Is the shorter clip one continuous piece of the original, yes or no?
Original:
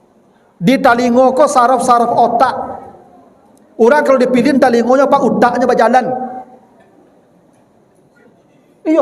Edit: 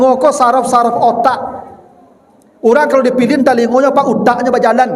yes